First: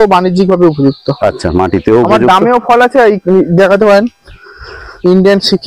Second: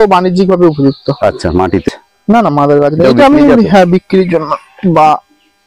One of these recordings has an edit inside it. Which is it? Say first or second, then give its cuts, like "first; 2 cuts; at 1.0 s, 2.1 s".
second; 1 cut; at 1.9 s